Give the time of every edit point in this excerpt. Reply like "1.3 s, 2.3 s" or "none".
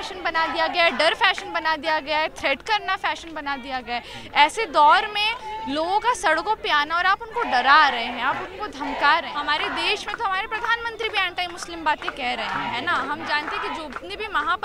2.6 s, 9.3 s